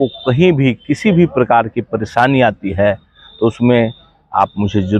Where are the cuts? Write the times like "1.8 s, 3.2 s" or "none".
none